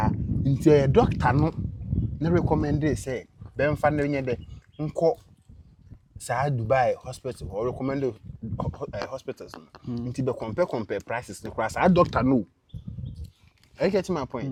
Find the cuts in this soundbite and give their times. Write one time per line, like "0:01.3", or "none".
none